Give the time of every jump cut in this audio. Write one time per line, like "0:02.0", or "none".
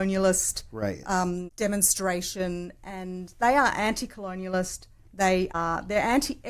0:01.5
0:05.5